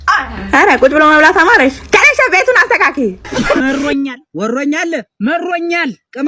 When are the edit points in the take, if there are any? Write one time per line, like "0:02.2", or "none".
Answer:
0:03.6